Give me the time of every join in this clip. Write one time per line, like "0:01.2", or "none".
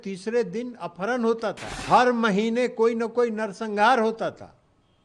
0:01.7